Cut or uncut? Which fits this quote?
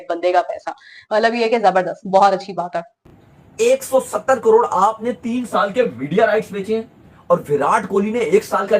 cut